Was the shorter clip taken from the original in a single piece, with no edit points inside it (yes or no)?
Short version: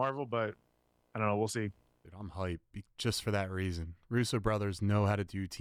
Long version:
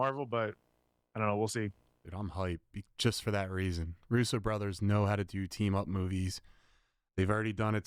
yes